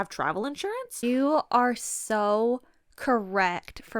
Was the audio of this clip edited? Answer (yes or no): yes